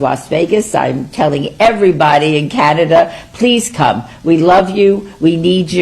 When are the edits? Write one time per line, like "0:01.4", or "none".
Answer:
0:04.0

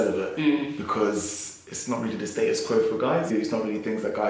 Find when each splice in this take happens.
0:03.3

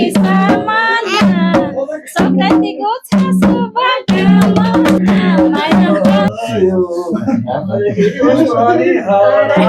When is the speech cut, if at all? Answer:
0:06.2

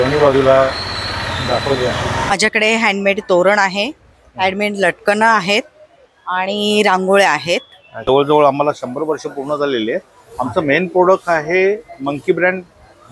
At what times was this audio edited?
0:02.3
0:08.0

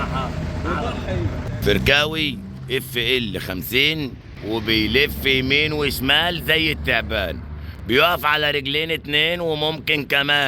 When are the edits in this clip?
0:01.6
0:04.3

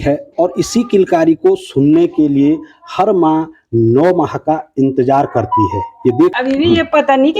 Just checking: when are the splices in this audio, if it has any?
0:06.3

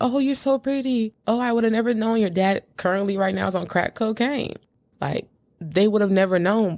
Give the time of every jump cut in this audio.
0:00.9

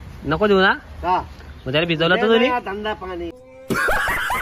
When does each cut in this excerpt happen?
0:03.5

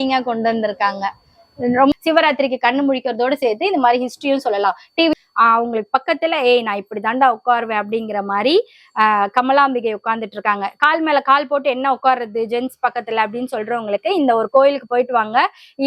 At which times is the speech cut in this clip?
0:01.9
0:05.1

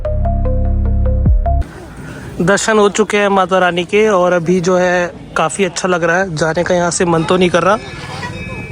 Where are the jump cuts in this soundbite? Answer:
0:01.6

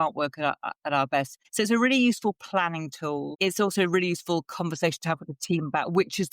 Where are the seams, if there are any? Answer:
0:01.4
0:03.3

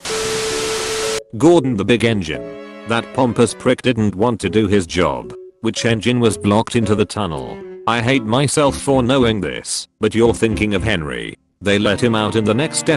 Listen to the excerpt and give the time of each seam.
0:01.3

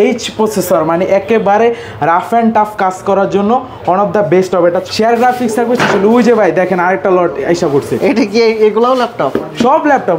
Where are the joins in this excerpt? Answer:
0:04.9

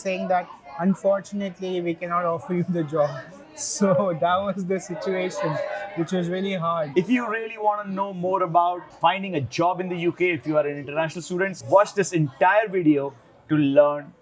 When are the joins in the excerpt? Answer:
0:06.9
0:08.9
0:11.6

